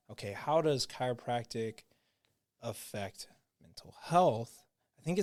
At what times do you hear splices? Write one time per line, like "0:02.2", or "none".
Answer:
none